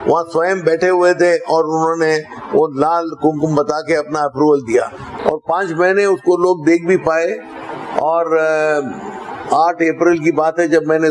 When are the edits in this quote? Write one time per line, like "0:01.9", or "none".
0:05.0